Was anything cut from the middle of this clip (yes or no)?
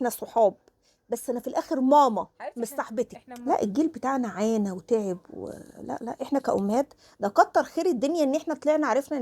yes